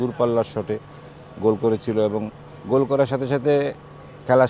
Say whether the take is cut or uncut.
uncut